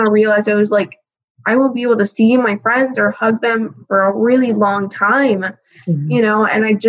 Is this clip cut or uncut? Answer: uncut